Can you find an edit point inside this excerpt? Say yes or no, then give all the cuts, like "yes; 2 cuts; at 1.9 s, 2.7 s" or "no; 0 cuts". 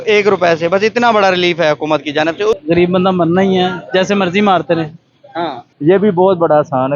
yes; 2 cuts; at 2.6 s, 5.7 s